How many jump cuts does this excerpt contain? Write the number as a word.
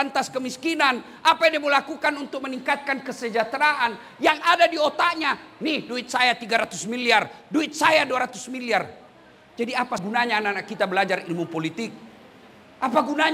one